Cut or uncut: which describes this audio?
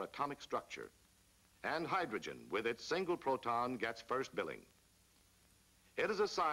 cut